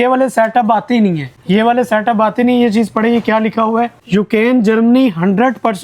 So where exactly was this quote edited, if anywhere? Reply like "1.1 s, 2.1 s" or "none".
1.3 s, 4.0 s